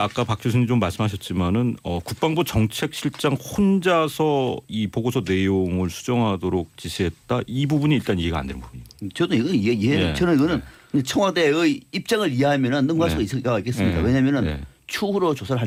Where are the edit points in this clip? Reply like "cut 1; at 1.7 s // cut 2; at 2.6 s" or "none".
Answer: none